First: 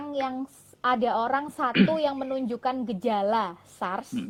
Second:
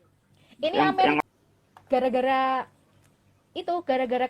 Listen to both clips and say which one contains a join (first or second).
second